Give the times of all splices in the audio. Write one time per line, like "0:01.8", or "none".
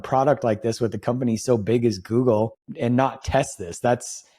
0:02.7